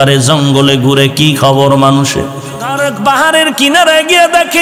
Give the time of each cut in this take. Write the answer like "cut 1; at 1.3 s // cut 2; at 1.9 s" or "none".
cut 1; at 2.8 s